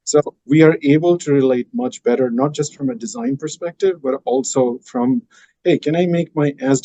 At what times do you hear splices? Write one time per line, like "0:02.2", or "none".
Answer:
none